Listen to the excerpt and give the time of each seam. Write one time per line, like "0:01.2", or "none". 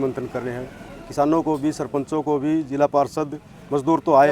none